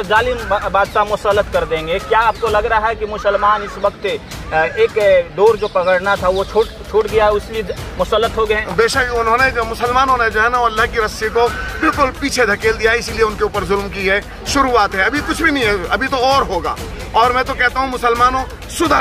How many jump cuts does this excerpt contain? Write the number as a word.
zero